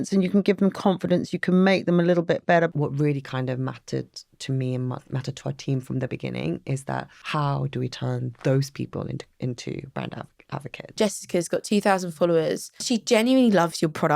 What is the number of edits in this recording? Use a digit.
4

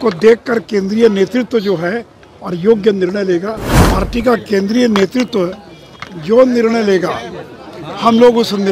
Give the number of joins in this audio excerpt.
1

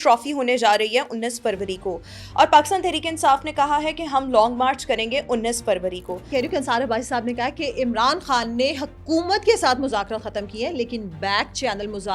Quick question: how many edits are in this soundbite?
1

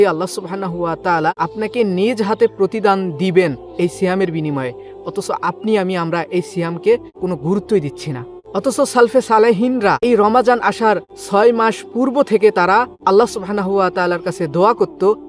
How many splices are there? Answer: 6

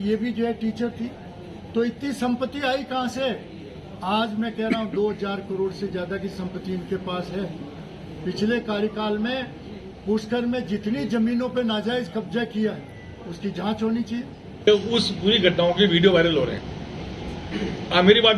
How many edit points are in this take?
1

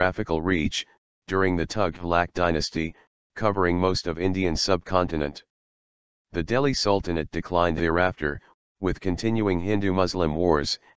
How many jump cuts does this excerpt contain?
1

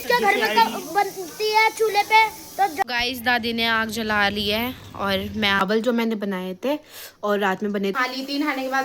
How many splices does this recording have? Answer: 3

